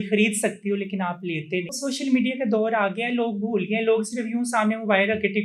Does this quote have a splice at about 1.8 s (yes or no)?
yes